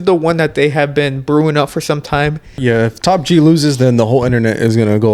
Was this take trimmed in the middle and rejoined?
yes; 1 cut; at 2.6 s

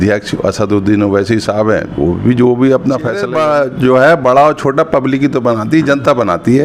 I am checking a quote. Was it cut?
yes; 1 cut; at 3.2 s

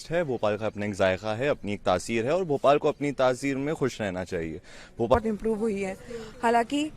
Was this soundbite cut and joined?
yes; 1 cut; at 5.1 s

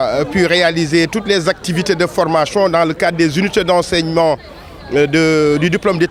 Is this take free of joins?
yes; 0 cuts

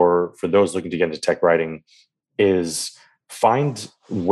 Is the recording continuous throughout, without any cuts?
yes; 0 cuts

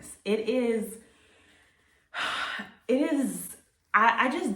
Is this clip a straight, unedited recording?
yes; 0 cuts

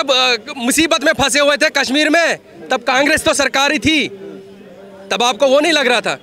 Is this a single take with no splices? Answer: yes; 0 cuts

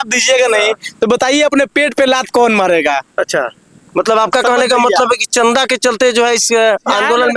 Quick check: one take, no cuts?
yes; 0 cuts

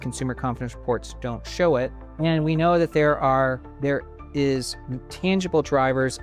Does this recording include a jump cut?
yes; 2 cuts; at 2.0 s, 3.7 s

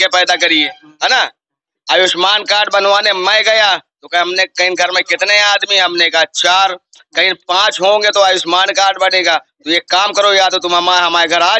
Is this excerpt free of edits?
yes; 0 cuts

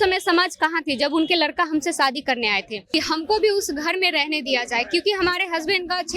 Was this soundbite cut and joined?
yes; 1 cut; at 2.9 s

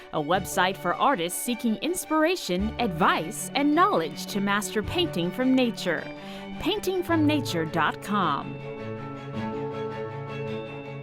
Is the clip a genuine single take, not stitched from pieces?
yes; 0 cuts

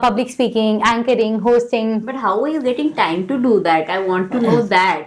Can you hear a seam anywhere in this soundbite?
no; 0 cuts

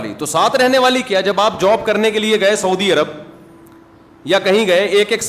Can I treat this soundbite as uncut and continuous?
yes; 0 cuts

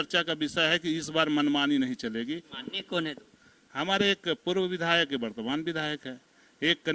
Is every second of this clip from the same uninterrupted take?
no; 1 cut; at 2.5 s

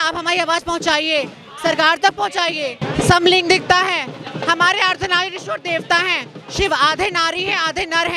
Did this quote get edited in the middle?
yes; 1 cut; at 2.9 s

